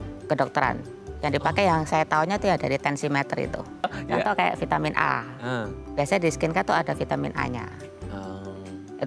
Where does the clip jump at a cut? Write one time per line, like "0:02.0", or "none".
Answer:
0:03.8